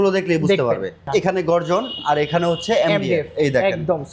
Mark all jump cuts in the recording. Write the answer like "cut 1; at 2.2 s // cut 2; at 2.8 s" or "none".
cut 1; at 1.0 s